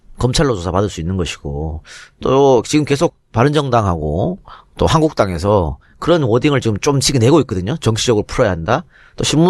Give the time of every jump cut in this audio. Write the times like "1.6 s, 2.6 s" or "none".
3.9 s